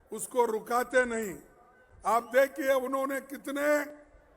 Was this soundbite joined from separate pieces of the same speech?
no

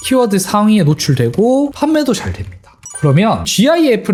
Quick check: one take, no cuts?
yes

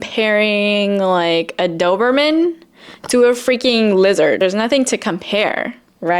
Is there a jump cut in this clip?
yes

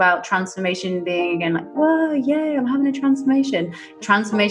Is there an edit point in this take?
no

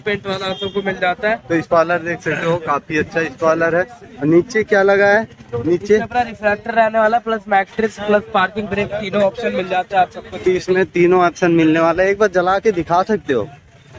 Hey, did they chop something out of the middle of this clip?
no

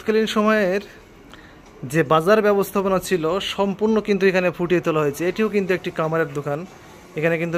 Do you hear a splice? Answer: no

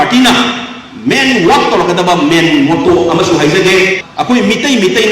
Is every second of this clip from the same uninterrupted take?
no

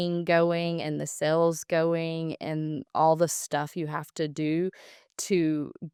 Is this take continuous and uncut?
yes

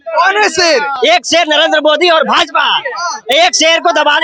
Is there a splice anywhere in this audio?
no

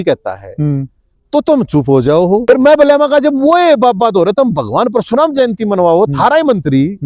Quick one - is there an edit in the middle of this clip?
yes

